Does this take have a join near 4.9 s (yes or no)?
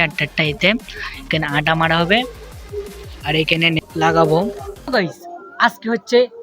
yes